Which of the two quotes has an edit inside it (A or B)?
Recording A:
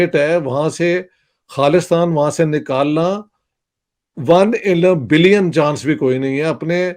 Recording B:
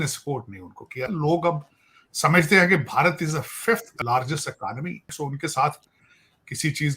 B